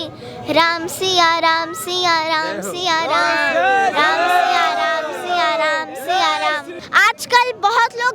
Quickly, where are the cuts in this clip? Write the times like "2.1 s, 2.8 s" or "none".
6.7 s